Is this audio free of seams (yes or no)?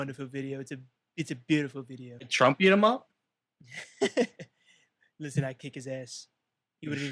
no